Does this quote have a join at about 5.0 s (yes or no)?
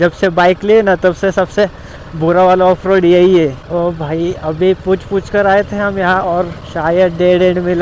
no